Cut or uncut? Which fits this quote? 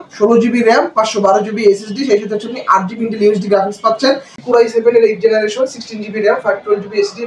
cut